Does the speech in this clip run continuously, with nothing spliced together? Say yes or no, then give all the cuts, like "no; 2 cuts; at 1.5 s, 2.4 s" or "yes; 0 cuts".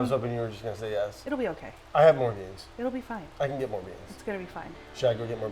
no; 1 cut; at 1.2 s